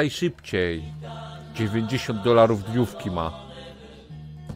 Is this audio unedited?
yes; 0 cuts

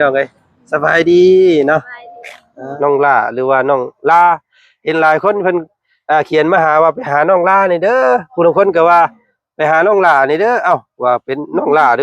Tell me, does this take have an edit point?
yes; 1 cut; at 2.7 s

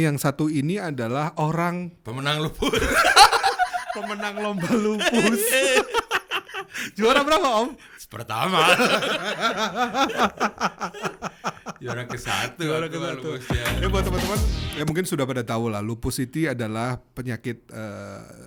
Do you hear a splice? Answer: no; 0 cuts

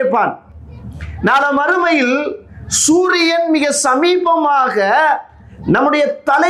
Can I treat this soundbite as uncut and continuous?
yes; 0 cuts

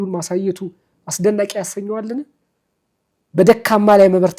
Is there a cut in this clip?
no; 0 cuts

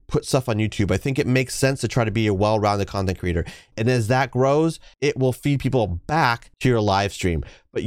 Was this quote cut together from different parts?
yes; 1 cut; at 3.7 s

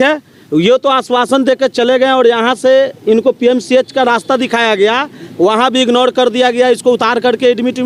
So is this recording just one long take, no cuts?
yes; 0 cuts

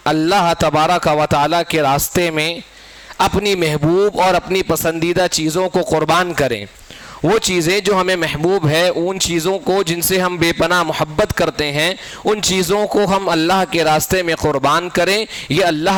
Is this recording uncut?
yes; 0 cuts

